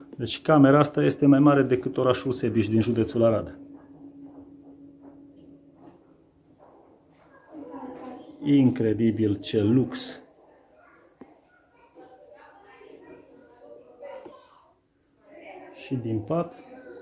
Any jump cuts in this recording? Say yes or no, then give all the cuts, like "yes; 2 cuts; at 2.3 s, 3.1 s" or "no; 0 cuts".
no; 0 cuts